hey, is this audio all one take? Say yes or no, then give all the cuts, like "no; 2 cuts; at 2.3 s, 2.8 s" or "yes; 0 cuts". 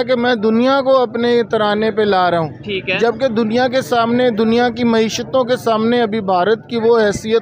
yes; 0 cuts